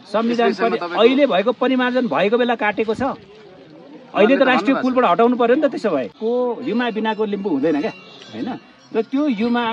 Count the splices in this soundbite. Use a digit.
1